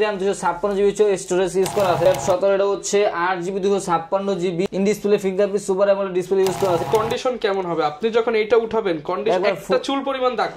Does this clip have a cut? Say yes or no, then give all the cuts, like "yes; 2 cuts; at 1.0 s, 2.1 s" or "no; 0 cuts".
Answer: yes; 3 cuts; at 2.1 s, 4.6 s, 6.8 s